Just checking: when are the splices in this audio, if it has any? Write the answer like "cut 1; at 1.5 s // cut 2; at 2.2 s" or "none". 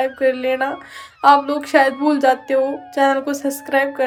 none